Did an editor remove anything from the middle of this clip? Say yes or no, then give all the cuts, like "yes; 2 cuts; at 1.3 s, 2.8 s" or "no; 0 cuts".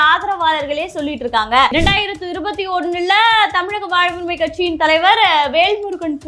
yes; 1 cut; at 1.7 s